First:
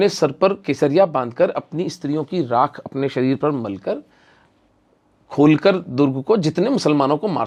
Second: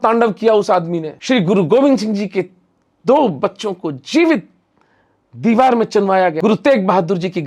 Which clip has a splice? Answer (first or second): second